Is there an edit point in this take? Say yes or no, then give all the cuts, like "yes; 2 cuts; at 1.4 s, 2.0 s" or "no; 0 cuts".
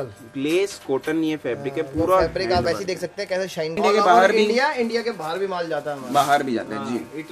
yes; 1 cut; at 3.8 s